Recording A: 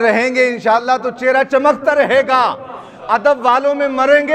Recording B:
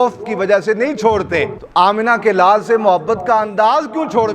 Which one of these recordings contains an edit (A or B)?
B